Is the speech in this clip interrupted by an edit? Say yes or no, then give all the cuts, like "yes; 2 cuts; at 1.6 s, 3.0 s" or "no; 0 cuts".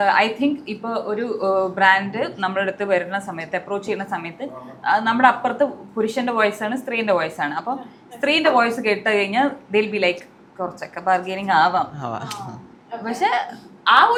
no; 0 cuts